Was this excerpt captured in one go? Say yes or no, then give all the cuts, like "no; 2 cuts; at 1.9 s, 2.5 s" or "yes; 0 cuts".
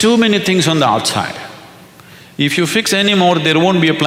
yes; 0 cuts